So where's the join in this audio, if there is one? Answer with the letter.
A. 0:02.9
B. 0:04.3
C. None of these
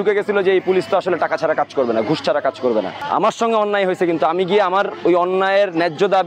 C